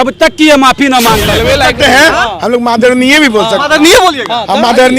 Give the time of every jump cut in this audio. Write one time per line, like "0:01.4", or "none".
0:01.3